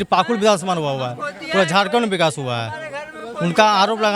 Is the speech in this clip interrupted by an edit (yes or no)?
no